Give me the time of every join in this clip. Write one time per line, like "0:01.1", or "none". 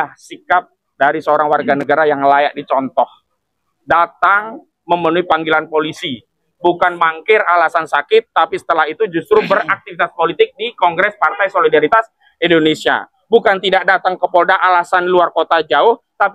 none